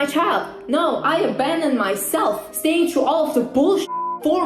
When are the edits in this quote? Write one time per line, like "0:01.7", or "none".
0:02.5

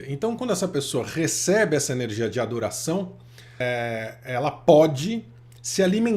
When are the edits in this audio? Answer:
0:03.6

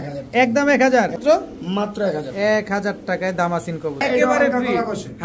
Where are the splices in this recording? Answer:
0:01.2
0:04.0

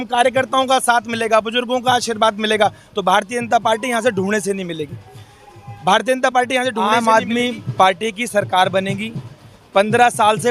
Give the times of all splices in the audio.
0:06.8

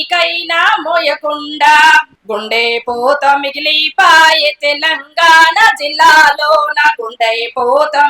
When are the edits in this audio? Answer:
0:02.2

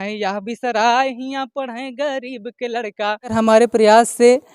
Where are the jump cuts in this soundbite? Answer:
0:03.3

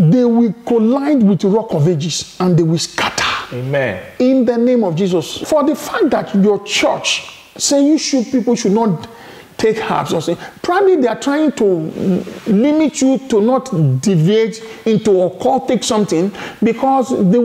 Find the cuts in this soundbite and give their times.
0:05.4

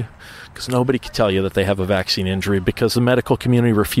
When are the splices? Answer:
none

